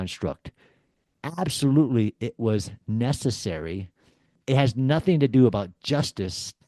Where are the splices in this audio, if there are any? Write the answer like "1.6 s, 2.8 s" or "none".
none